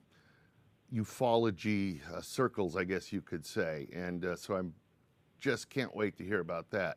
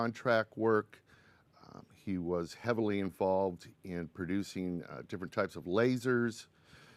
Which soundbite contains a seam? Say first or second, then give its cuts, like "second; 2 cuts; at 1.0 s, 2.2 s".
second; 1 cut; at 2.2 s